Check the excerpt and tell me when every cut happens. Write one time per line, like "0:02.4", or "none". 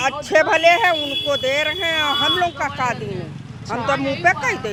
none

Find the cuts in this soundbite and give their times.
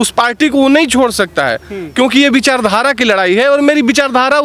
none

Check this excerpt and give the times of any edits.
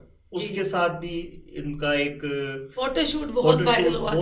none

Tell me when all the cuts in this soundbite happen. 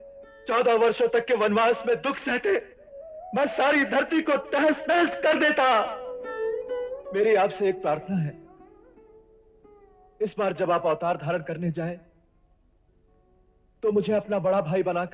0:07.0

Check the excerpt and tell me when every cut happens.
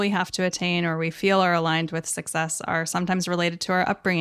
none

